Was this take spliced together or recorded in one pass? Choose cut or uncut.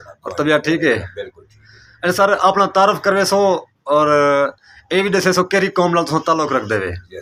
uncut